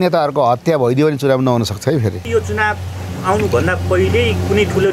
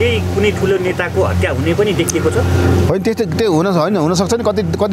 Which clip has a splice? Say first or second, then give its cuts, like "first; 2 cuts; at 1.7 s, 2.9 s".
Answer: first; 1 cut; at 2.2 s